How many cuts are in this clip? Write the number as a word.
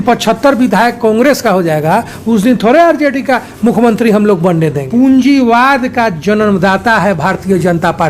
one